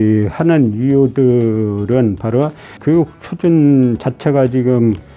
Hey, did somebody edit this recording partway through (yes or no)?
yes